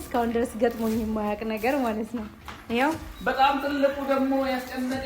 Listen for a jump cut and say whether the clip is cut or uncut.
cut